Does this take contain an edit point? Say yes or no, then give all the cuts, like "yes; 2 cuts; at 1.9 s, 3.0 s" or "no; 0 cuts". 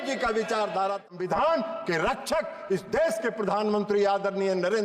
yes; 1 cut; at 1.1 s